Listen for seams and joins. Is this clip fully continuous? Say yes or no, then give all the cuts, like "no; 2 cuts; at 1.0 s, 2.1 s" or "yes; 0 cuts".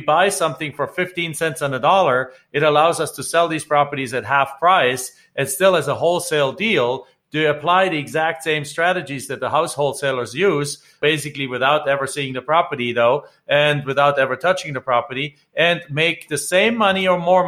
yes; 0 cuts